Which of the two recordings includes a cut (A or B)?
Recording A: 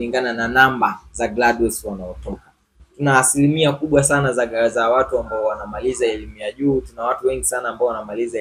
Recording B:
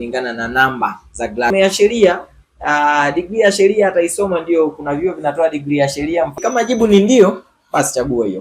B